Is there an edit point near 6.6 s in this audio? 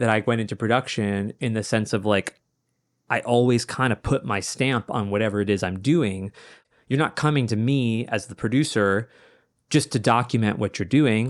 yes; 1 cut; at 6.6 s

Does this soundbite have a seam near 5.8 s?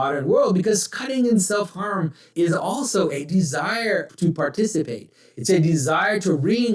no; 2 cuts; at 2.3 s, 4.1 s

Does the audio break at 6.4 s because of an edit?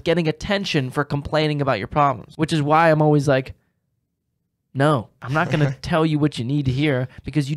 no; 2 cuts; at 2.3 s, 5.2 s

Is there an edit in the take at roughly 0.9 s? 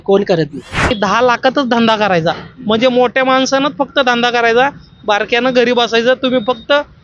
yes; 1 cut; at 0.9 s

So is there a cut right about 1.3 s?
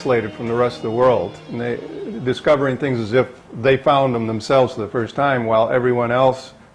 no; 0 cuts

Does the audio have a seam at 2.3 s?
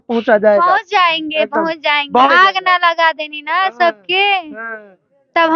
yes; 1 cut; at 2.3 s

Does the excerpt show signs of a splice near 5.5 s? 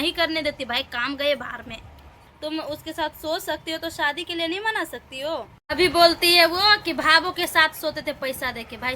yes; 2 cuts; at 2.2 s, 5.5 s

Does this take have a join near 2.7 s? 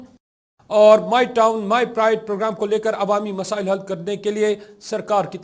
no; 0 cuts

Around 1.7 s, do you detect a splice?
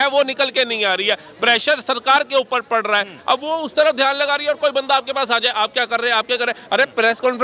no; 0 cuts

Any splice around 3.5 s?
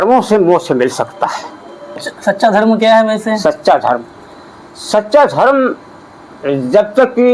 no; 1 cut; at 2.1 s

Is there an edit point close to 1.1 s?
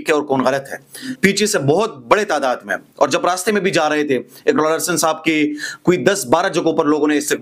yes; 1 cut; at 1.1 s

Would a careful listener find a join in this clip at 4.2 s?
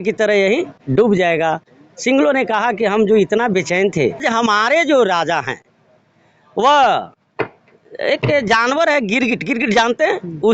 yes; 1 cut; at 4.2 s

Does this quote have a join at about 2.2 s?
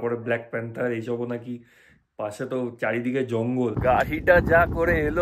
no; 1 cut; at 3.8 s

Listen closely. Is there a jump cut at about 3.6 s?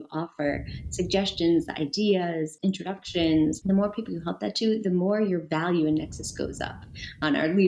yes; 2 cuts; at 2.5 s, 3.6 s

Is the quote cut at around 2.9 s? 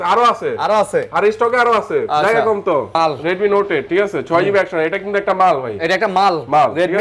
yes; 1 cut; at 2.9 s

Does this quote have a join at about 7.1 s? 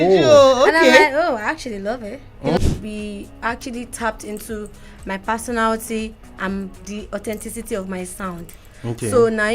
no; 1 cut; at 2.6 s

